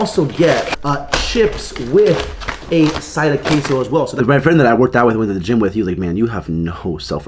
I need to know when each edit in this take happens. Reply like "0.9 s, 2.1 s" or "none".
4.2 s